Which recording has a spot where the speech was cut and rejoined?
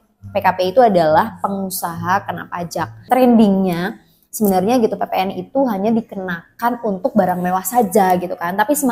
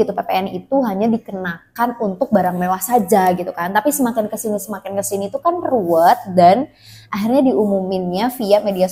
first; 1 cut; at 3.1 s

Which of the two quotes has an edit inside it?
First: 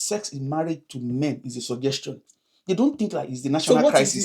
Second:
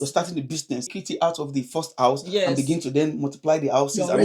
second; 1 cut; at 1.0 s

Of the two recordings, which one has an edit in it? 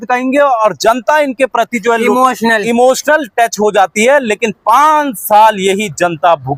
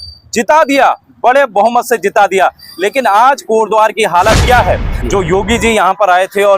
second; 1 cut; at 4.9 s

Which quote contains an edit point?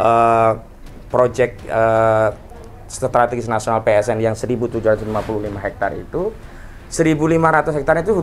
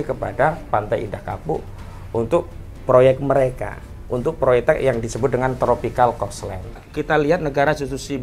second; 1 cut; at 6.9 s

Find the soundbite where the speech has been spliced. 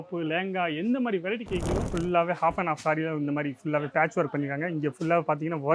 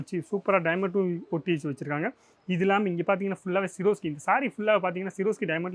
first; 1 cut; at 1.9 s

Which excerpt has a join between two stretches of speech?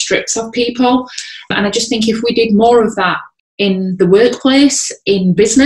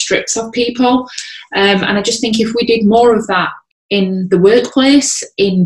first; 1 cut; at 1.5 s

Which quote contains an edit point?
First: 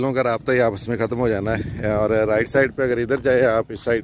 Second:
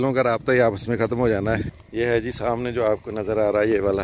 second; 1 cut; at 1.7 s

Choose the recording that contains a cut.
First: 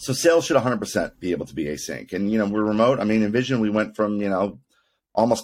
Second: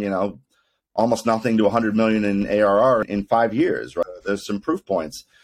second; 2 cuts; at 3.0 s, 4.0 s

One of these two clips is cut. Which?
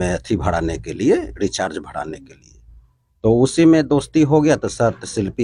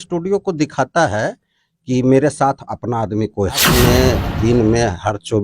second; 1 cut; at 3.7 s

